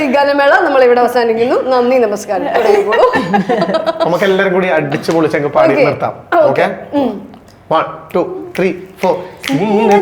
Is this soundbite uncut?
yes; 0 cuts

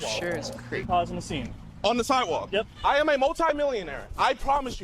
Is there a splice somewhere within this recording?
yes; 2 cuts; at 0.8 s, 2.7 s

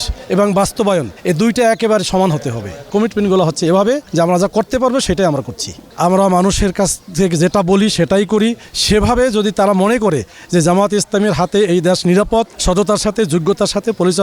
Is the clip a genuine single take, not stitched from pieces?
no; 5 cuts; at 1.1 s, 2.9 s, 4.1 s, 5.8 s, 12.6 s

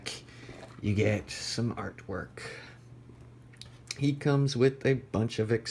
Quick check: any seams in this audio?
yes; 1 cut; at 2.7 s

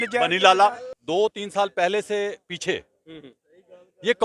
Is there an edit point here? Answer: yes; 1 cut; at 0.9 s

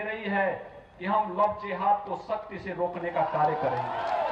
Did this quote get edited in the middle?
no; 0 cuts

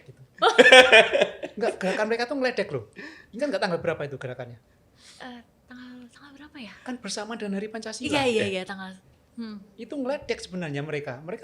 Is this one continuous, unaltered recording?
yes; 0 cuts

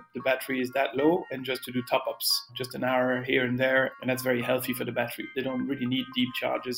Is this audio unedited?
no; 3 cuts; at 2.5 s, 3.9 s, 5.3 s

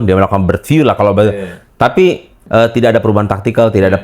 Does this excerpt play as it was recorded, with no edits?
no; 1 cut; at 2.4 s

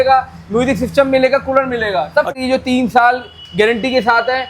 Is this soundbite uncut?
no; 1 cut; at 2.3 s

